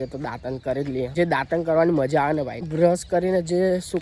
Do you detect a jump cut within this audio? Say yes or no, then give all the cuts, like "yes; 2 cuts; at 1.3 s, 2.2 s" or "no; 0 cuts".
no; 0 cuts